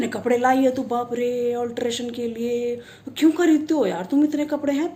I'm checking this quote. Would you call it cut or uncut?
uncut